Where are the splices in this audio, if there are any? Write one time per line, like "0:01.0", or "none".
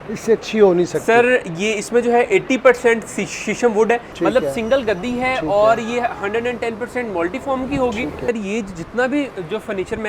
0:04.1
0:08.3